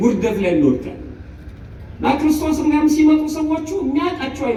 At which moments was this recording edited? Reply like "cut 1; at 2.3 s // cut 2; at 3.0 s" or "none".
none

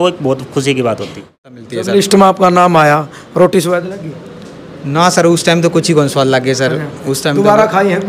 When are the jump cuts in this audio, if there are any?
cut 1; at 1.6 s

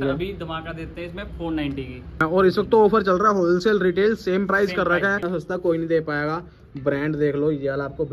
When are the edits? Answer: cut 1; at 2.2 s // cut 2; at 5.2 s

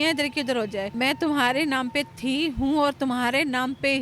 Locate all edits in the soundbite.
cut 1; at 0.9 s

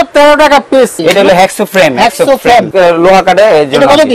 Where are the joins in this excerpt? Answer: cut 1; at 1.0 s // cut 2; at 2.7 s

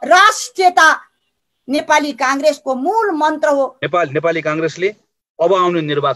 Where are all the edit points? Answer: cut 1; at 3.8 s

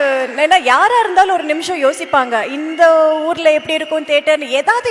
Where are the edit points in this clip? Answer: none

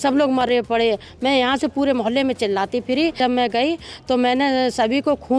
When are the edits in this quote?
cut 1; at 3.2 s

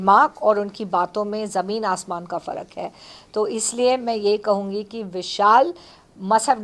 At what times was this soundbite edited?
none

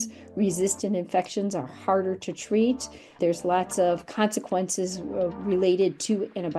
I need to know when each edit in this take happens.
cut 1; at 3.1 s

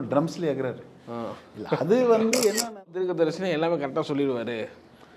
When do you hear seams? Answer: cut 1; at 2.9 s

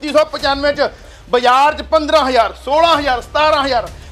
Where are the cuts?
cut 1; at 1.1 s

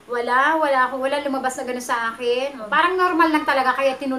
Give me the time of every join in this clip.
cut 1; at 2.6 s

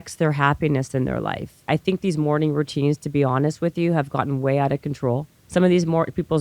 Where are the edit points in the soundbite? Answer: cut 1; at 1.6 s // cut 2; at 5.3 s

